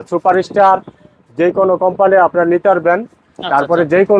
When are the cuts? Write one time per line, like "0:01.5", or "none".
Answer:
none